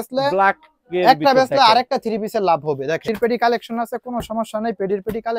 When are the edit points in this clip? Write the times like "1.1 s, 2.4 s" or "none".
3.1 s

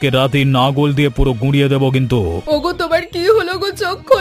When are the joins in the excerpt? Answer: 2.4 s

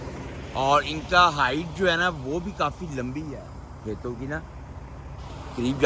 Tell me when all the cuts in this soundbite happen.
none

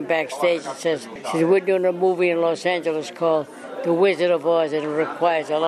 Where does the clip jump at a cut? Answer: 1.1 s

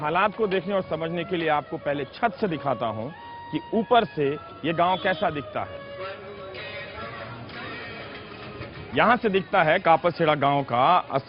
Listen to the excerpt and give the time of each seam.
9.8 s

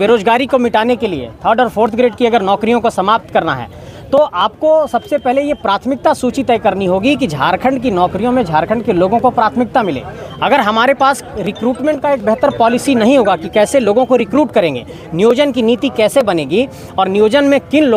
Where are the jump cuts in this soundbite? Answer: none

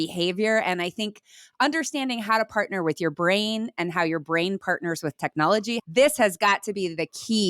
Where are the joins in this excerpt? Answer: 5.8 s

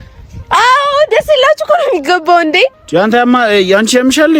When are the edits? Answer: none

